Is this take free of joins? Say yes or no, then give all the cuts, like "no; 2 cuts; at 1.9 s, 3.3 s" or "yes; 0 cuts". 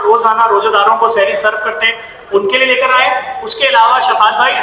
yes; 0 cuts